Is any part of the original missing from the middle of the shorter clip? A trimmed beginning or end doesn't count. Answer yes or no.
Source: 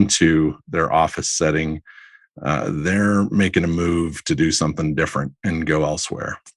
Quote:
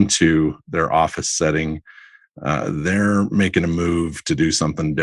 no